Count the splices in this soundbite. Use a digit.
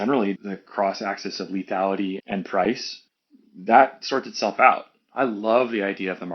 1